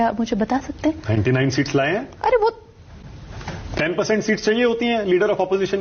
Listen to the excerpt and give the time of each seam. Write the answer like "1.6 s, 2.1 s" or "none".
2.6 s